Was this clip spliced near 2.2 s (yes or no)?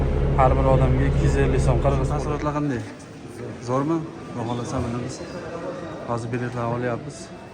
yes